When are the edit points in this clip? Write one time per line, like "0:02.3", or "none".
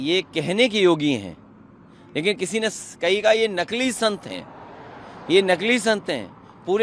none